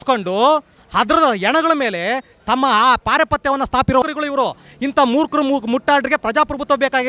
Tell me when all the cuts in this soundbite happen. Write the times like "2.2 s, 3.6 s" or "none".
4.0 s